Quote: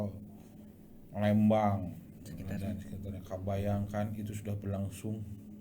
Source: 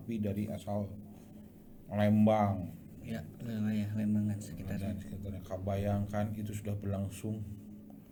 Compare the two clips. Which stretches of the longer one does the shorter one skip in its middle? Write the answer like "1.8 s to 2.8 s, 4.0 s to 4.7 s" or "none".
3.0 s to 4.4 s